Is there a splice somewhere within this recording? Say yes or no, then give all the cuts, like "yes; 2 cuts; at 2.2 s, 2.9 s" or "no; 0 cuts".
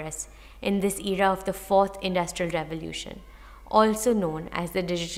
no; 0 cuts